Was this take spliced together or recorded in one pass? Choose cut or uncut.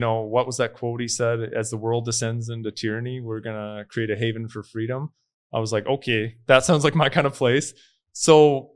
uncut